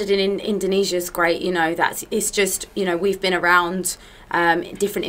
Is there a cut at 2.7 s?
no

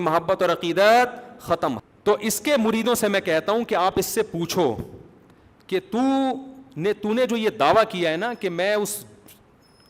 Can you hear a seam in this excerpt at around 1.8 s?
yes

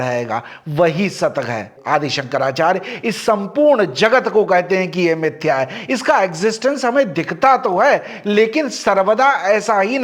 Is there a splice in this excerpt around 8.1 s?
no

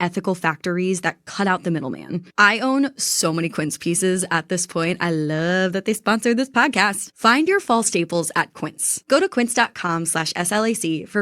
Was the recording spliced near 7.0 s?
yes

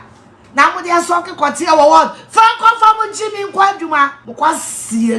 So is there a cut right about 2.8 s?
no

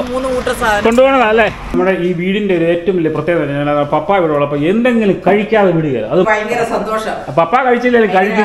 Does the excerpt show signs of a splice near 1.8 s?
yes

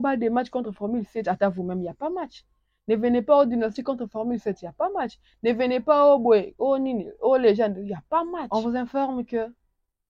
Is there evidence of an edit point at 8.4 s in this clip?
yes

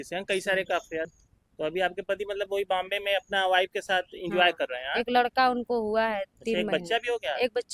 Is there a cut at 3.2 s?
no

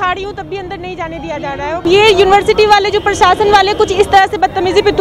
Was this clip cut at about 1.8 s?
yes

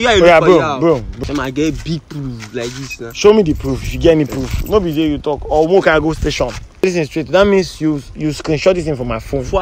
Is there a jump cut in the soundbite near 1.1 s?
yes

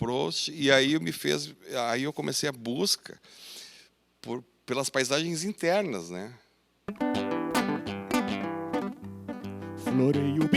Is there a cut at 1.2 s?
no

